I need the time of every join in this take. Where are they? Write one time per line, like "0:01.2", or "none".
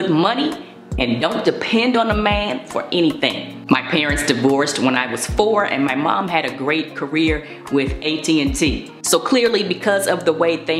none